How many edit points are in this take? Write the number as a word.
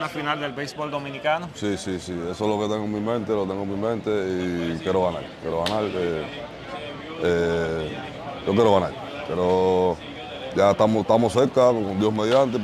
zero